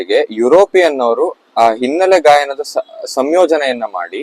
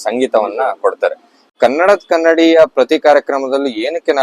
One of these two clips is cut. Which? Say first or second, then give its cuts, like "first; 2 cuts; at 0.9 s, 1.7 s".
second; 1 cut; at 1.5 s